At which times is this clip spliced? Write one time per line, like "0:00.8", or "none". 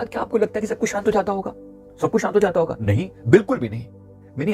none